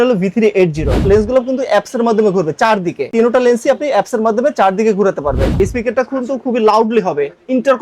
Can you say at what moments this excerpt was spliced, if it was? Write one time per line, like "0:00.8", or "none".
0:01.0
0:05.5